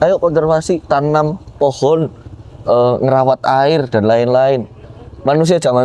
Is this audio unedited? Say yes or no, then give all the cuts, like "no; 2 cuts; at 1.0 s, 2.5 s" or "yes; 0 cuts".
yes; 0 cuts